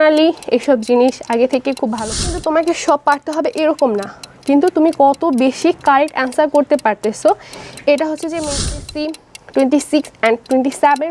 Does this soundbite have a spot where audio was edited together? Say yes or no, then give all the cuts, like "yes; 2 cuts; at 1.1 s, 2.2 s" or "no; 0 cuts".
yes; 2 cuts; at 2.2 s, 8.8 s